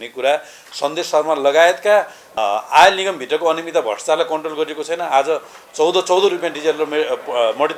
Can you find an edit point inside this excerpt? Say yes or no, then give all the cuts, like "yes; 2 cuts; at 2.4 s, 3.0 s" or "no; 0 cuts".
yes; 1 cut; at 2.3 s